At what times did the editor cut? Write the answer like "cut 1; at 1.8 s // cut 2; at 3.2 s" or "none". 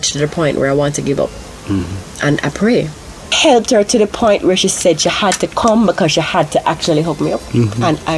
cut 1; at 3.3 s